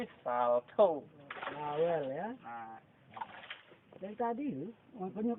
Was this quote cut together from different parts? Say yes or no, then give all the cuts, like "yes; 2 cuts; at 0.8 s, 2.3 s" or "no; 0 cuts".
yes; 1 cut; at 3.7 s